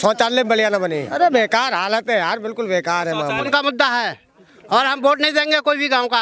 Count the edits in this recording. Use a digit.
2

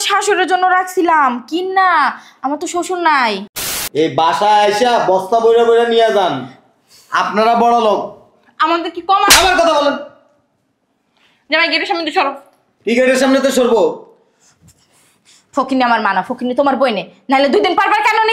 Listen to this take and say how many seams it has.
1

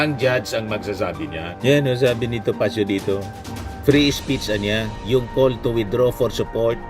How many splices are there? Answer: 1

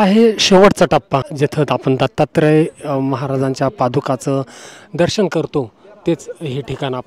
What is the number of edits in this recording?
1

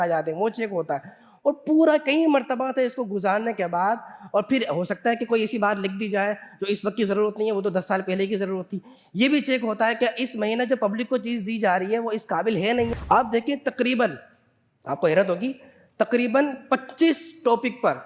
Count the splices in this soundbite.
1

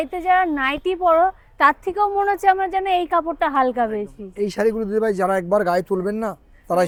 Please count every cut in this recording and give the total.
0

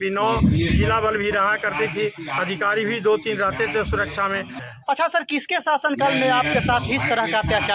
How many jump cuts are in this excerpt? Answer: 1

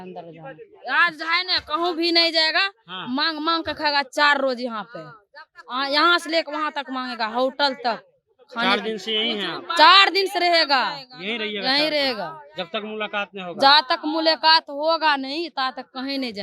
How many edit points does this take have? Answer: 0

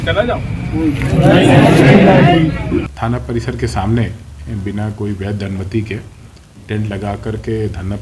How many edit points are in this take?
1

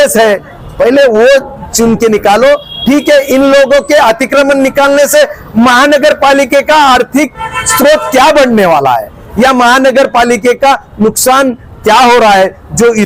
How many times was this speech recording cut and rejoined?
0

